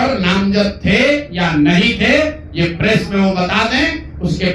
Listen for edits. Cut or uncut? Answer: uncut